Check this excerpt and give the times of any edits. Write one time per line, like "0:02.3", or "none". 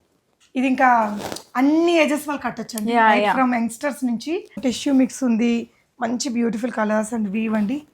0:04.6